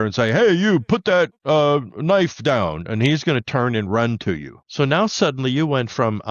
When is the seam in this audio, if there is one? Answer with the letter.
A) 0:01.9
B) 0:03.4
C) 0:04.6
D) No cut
C